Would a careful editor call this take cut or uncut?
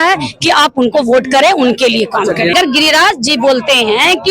cut